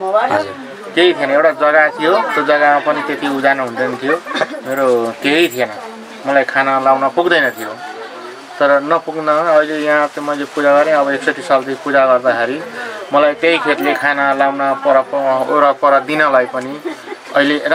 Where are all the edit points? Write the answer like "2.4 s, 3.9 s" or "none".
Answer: none

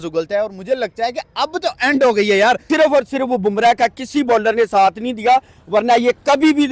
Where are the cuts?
2.6 s

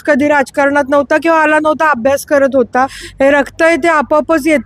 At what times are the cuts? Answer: 3.0 s

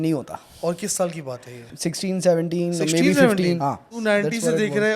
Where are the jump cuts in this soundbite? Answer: 1.7 s, 3.7 s

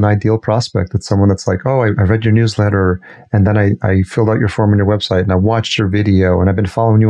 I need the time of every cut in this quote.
none

